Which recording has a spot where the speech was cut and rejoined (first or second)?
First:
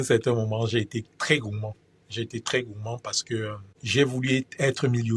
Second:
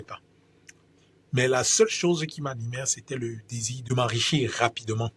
second